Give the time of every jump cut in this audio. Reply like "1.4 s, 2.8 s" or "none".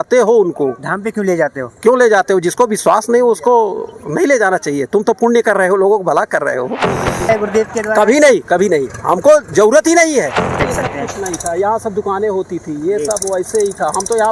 7.3 s, 10.7 s